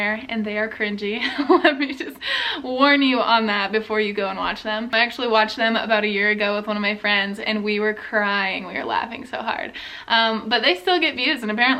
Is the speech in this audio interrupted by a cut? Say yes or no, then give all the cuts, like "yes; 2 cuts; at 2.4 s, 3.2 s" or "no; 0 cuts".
no; 0 cuts